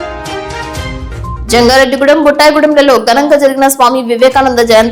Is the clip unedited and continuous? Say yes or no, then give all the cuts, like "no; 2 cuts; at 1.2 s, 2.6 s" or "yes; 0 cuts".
yes; 0 cuts